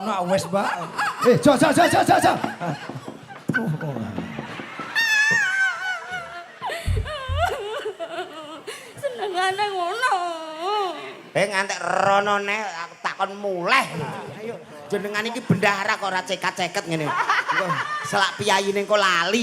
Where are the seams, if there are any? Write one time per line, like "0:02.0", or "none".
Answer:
0:14.4